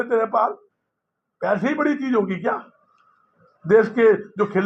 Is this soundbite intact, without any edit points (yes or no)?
yes